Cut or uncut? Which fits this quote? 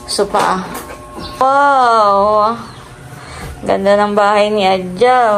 cut